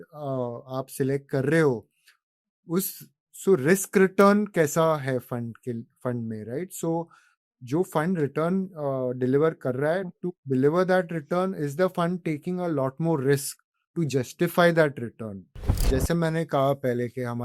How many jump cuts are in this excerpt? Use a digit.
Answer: 1